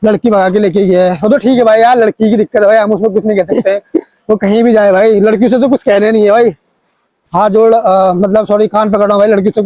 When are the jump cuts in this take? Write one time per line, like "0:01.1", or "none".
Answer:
none